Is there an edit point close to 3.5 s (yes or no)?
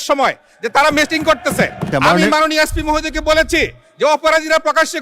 no